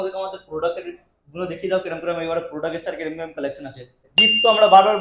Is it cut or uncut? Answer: cut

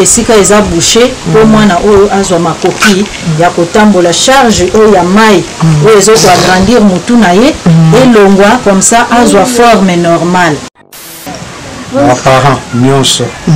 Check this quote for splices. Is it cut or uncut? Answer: cut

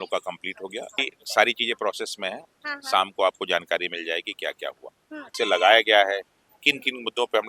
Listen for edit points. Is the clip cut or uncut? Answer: cut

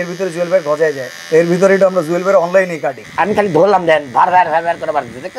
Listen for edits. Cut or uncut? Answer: cut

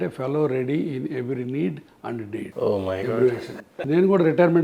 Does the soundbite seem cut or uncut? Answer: cut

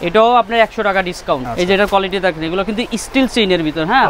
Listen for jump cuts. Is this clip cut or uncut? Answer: cut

